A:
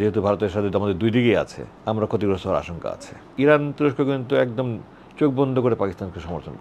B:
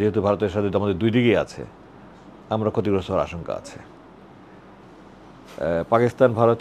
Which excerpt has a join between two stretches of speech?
A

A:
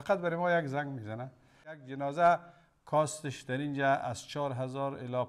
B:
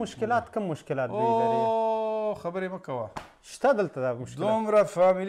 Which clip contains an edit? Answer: A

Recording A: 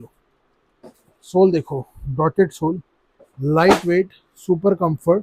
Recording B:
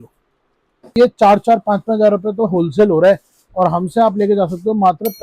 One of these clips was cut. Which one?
B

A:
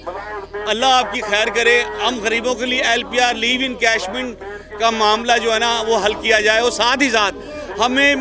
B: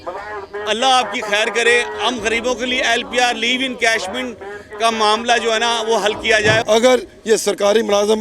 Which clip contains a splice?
B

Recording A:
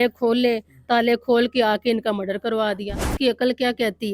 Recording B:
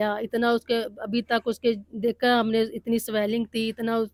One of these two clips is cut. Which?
A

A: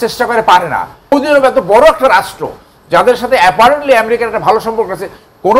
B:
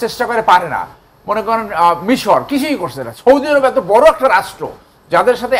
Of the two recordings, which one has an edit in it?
A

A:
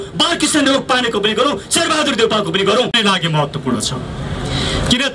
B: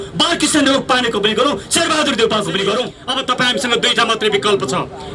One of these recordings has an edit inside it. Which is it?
B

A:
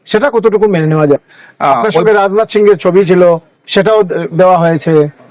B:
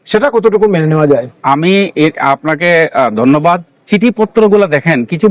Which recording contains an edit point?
A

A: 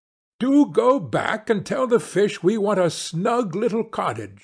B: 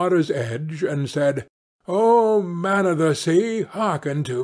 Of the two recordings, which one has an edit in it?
B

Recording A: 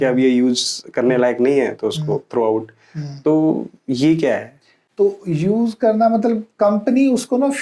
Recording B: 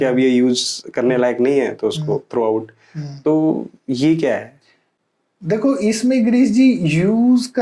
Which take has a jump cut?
A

